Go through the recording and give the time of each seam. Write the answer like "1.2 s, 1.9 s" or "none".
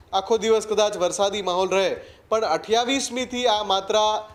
none